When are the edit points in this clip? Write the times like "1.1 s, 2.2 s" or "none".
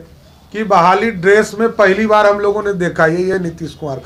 none